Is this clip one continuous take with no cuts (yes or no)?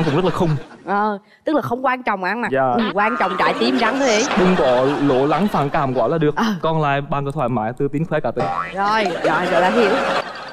yes